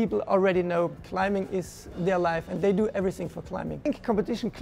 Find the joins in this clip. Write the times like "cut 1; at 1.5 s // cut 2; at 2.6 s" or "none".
cut 1; at 0.9 s // cut 2; at 3.9 s